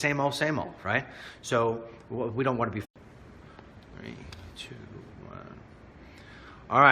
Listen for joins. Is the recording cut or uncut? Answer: uncut